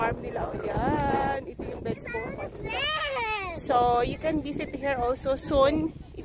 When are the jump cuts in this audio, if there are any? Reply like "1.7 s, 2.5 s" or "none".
none